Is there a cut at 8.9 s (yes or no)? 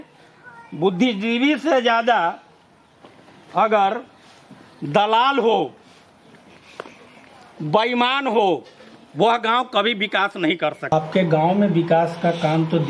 no